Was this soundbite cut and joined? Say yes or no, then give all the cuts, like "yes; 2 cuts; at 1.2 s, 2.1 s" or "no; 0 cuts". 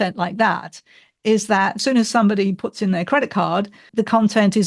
yes; 2 cuts; at 1.8 s, 3.9 s